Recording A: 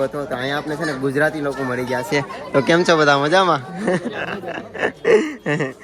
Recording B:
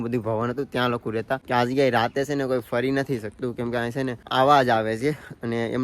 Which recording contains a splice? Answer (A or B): B